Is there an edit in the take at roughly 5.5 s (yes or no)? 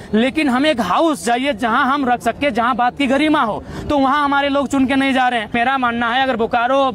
yes